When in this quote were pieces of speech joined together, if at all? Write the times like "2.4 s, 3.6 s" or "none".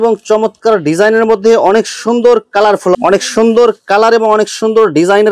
3.0 s